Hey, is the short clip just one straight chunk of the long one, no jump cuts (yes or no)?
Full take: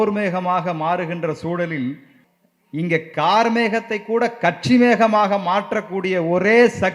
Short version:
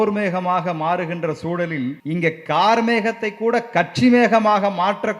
no